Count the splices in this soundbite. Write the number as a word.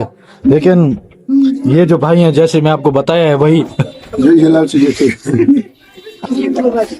zero